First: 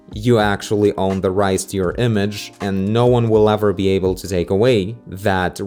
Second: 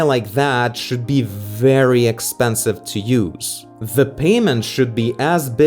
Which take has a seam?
second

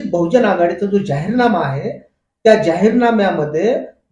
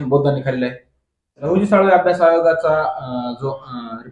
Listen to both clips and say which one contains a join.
second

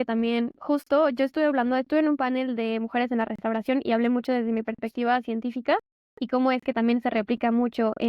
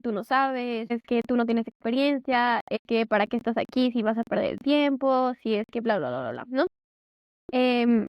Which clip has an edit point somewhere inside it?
second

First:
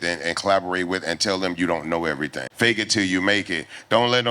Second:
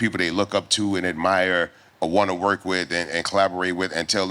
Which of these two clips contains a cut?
first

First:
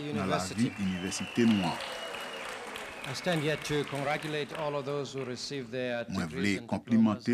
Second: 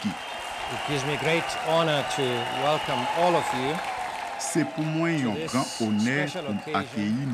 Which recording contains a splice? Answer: second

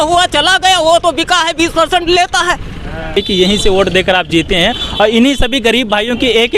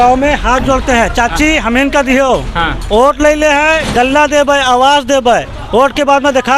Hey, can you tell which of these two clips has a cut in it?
first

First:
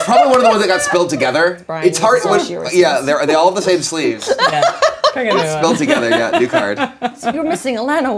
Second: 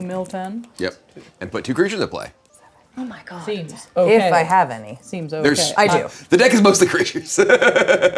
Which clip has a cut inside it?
first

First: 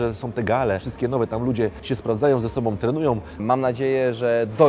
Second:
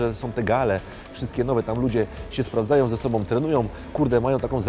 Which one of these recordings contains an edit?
first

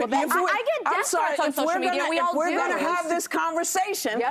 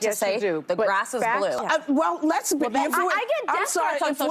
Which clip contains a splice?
second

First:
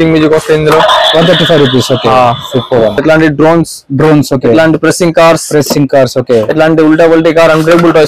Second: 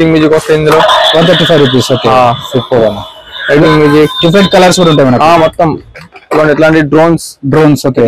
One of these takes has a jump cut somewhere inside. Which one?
first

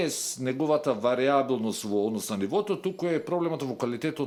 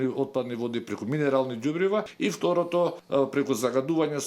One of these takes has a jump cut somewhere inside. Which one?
second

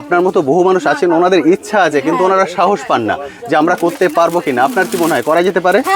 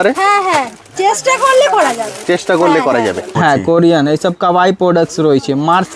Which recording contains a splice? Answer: second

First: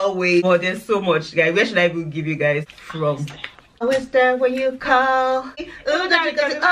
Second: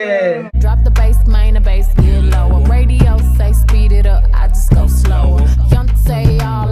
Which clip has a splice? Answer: first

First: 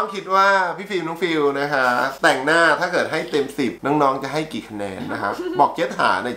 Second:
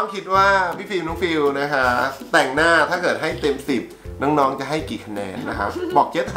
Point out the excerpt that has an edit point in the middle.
first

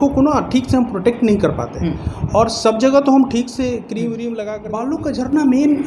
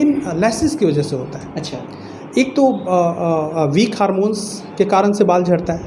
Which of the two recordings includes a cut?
first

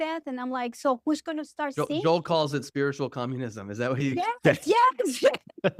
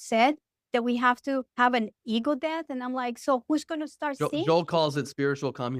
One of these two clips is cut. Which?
second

